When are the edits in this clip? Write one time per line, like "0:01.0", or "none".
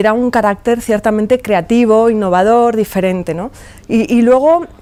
none